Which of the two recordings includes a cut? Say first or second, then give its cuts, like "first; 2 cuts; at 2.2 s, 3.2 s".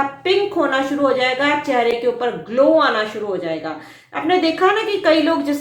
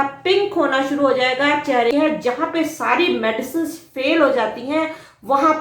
second; 1 cut; at 1.9 s